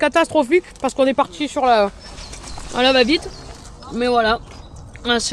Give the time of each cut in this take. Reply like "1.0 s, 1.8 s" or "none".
none